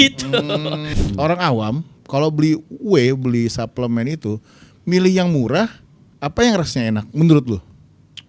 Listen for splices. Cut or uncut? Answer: cut